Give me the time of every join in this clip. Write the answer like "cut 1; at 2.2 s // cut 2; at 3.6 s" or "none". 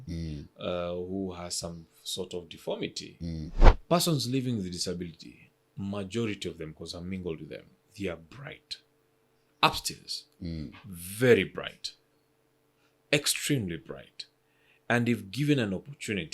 cut 1; at 3.7 s